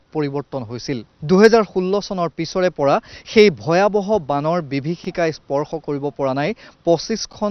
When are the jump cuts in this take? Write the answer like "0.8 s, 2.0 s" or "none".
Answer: 1.1 s